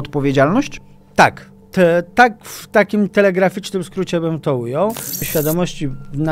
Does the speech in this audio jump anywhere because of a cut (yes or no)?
yes